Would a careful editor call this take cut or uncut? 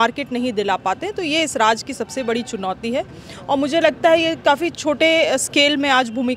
uncut